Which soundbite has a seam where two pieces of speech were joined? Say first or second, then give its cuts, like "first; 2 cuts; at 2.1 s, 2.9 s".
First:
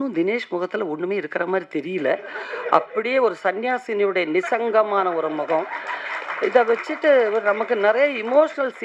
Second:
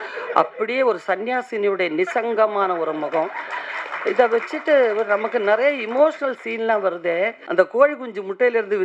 second; 1 cut; at 7.4 s